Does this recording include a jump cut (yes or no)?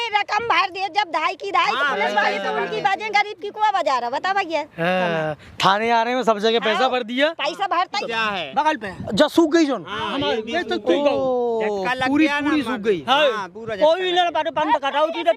yes